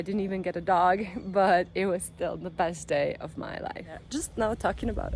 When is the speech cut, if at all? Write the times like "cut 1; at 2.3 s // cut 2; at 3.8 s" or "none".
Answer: cut 1; at 4.0 s